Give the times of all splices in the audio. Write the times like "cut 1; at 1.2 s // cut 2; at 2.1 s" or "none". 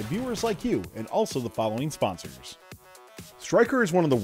cut 1; at 2.8 s